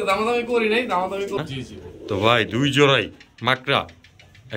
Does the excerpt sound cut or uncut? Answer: cut